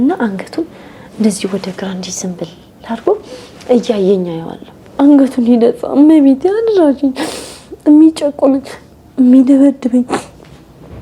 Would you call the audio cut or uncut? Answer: cut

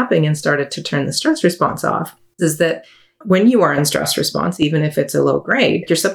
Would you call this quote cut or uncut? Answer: cut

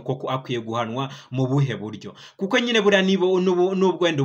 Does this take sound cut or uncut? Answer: uncut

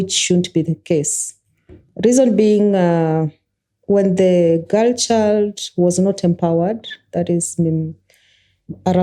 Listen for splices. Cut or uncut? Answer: uncut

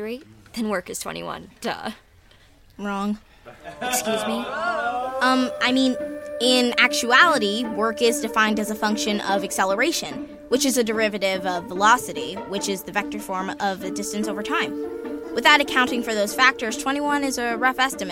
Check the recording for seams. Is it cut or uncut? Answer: cut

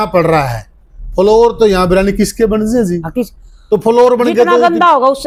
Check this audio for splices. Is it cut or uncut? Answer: uncut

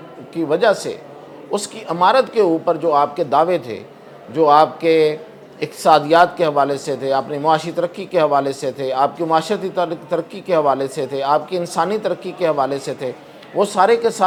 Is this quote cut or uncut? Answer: uncut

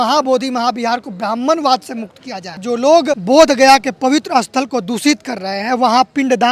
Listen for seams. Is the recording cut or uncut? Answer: cut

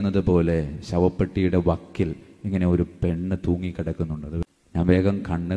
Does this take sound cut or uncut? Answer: cut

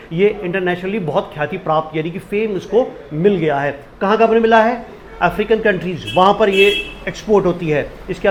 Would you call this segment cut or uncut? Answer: uncut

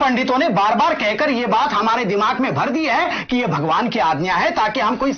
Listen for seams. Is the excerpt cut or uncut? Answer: uncut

